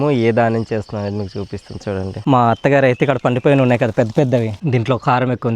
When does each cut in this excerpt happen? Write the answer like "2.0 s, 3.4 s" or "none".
2.2 s, 4.6 s